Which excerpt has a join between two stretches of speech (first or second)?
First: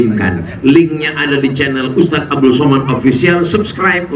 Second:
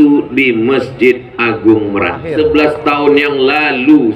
second